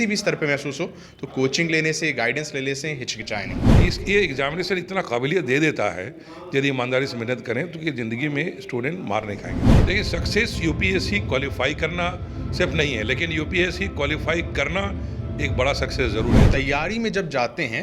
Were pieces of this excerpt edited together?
yes; 3 cuts; at 3.6 s, 9.6 s, 16.4 s

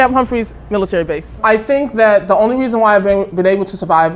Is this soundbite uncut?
no; 1 cut; at 1.3 s

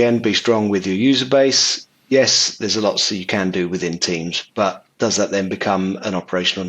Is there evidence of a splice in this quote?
no; 0 cuts

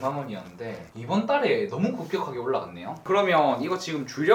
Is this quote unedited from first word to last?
yes; 0 cuts

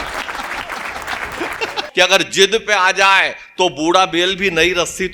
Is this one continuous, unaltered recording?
no; 1 cut; at 1.8 s

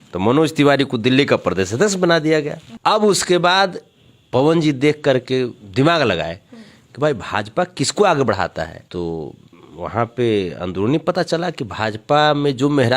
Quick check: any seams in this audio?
yes; 2 cuts; at 2.6 s, 8.8 s

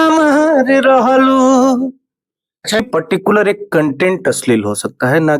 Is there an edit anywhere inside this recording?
yes; 1 cut; at 2.8 s

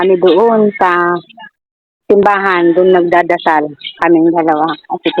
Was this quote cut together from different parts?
no; 0 cuts

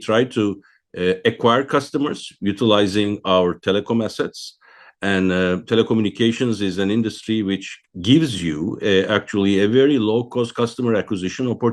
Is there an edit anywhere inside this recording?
no; 0 cuts

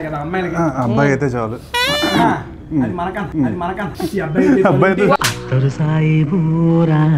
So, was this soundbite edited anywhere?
yes; 1 cut; at 3.8 s

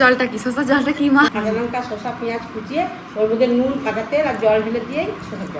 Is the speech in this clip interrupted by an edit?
no; 0 cuts

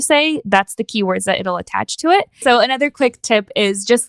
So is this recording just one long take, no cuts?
no; 1 cut; at 2.4 s

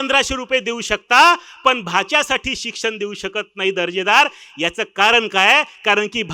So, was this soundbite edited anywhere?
no; 0 cuts

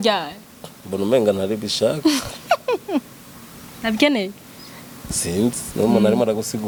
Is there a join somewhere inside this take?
no; 0 cuts

